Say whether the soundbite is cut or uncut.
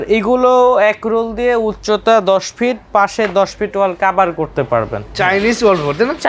cut